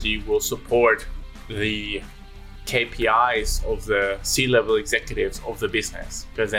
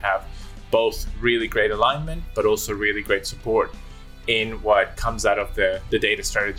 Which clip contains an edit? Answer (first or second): second